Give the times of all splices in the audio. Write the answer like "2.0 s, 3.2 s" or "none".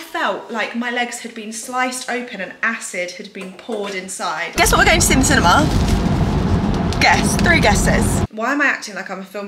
4.5 s, 8.3 s